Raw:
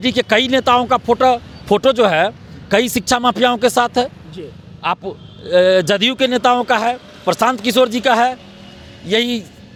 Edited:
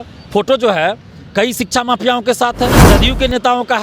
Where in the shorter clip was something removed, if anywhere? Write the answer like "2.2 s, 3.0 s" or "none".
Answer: 2.9 s

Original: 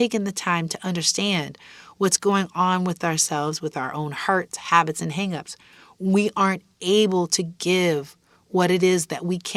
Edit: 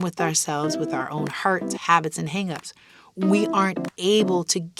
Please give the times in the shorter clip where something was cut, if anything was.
none

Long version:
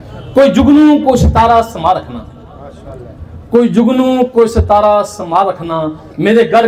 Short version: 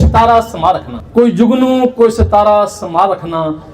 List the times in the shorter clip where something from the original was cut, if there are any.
0.9 s

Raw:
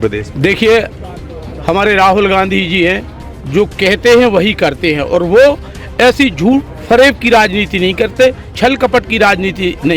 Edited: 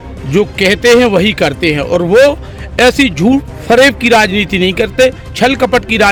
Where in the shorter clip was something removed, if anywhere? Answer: none

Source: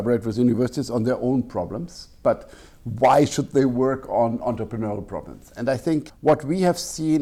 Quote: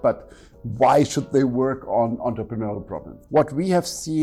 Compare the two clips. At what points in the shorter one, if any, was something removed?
3.2 s

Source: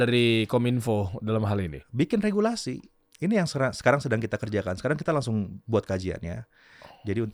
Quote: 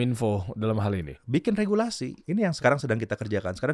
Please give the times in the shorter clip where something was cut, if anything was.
2.5 s

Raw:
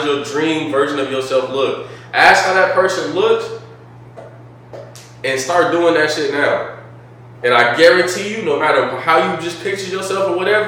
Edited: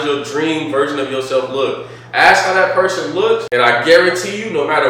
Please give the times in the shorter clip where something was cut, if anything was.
3.5 s

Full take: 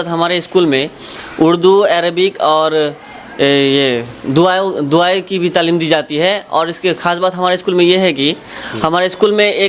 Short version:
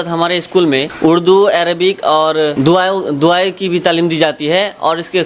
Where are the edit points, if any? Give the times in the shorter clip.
0.9 s, 2.5 s

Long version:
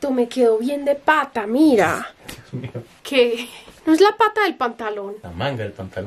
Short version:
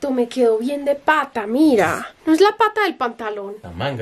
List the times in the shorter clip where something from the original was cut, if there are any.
2.1 s

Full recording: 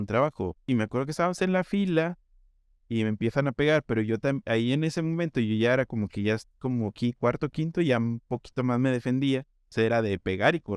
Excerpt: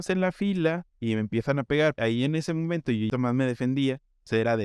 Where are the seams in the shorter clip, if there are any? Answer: 0.9 s, 2.0 s, 3.1 s

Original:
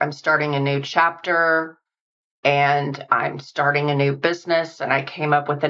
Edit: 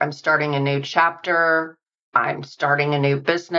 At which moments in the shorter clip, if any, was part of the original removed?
2.0 s

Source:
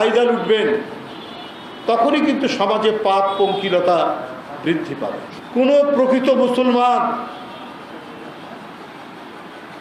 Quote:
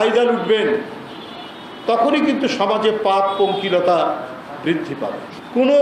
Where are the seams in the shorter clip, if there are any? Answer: none

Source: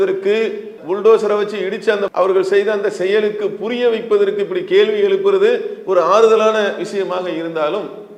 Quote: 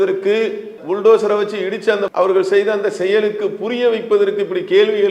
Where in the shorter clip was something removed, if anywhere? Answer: none

